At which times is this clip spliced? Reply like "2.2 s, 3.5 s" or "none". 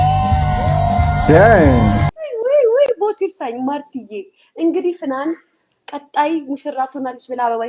1.9 s